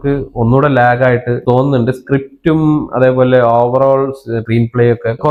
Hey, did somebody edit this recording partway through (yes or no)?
no